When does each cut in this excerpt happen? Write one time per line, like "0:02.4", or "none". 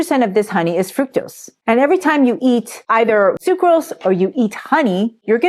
0:03.4